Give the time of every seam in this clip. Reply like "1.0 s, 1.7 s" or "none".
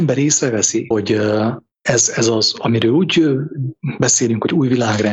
0.9 s, 1.7 s